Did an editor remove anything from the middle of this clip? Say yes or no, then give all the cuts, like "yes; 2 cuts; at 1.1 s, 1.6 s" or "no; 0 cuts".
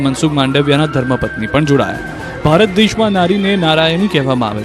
no; 0 cuts